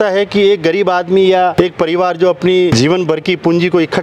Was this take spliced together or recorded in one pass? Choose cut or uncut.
cut